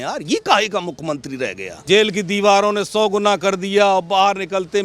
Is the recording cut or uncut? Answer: cut